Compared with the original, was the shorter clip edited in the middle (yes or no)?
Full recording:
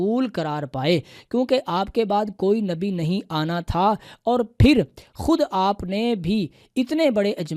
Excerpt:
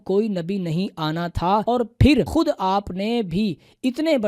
yes